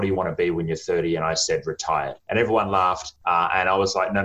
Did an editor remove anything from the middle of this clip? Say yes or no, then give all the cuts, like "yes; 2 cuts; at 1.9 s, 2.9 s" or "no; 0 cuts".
yes; 2 cuts; at 2.2 s, 3.1 s